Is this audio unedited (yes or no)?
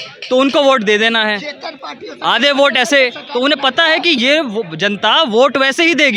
yes